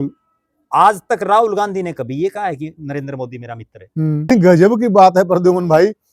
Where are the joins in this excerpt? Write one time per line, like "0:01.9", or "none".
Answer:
0:04.3